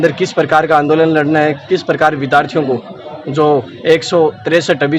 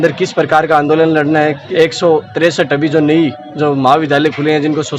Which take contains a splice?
second; 1 cut; at 1.6 s

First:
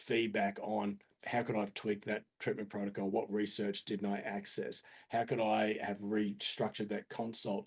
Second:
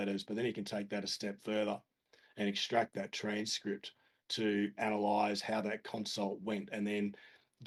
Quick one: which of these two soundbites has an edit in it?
first; 1 cut; at 1.1 s

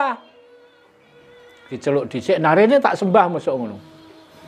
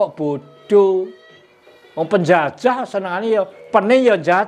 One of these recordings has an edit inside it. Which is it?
first; 1 cut; at 1.7 s

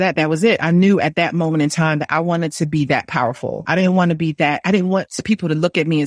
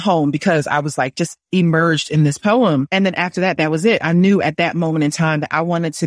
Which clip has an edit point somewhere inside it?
first; 2 cuts; at 3.6 s, 5.1 s

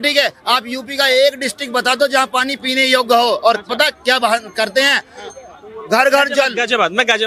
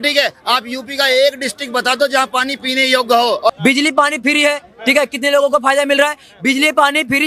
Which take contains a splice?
second; 1 cut; at 3.5 s

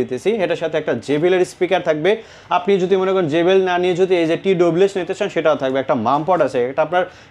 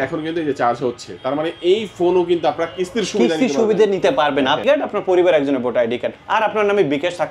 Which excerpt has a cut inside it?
second; 1 cut; at 4.6 s

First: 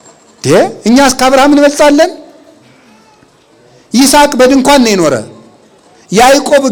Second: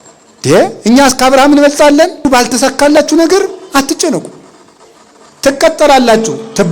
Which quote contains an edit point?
second; 1 cut; at 2.2 s

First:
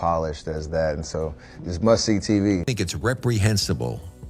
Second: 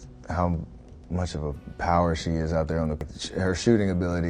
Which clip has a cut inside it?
first; 1 cut; at 2.7 s

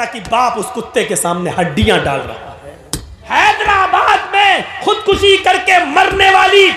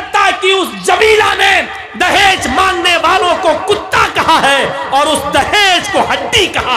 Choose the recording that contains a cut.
first; 1 cut; at 3.2 s

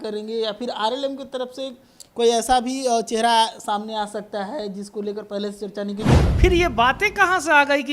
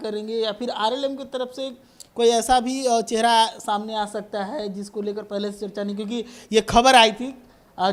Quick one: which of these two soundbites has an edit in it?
first; 1 cut; at 6.2 s

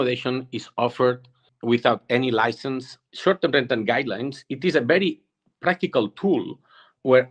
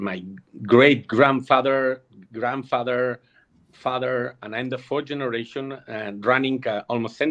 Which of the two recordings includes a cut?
first; 1 cut; at 3.0 s

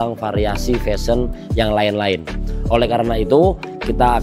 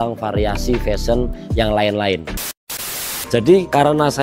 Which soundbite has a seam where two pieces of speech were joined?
second; 1 cut; at 2.7 s

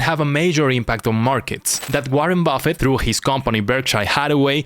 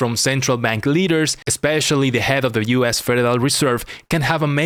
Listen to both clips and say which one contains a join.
first; 1 cut; at 1.7 s

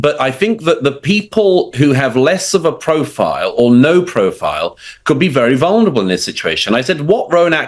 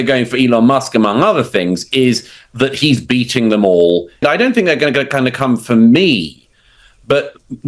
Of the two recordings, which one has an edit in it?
second; 1 cut; at 4.2 s

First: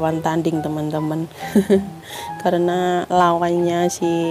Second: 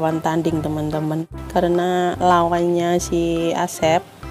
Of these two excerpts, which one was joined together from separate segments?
second; 1 cut; at 1.3 s

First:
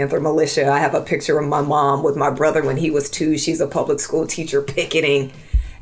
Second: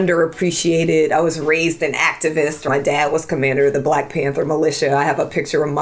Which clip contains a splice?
second; 1 cut; at 2.7 s

